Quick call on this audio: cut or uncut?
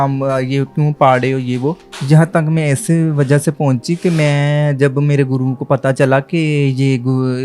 cut